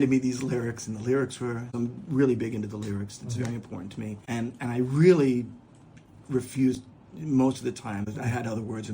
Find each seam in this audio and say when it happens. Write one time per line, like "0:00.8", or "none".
0:01.7
0:04.2
0:08.0